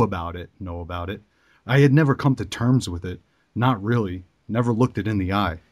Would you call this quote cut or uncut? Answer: uncut